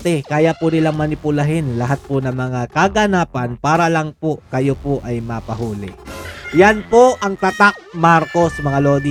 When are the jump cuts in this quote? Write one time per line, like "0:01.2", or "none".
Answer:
none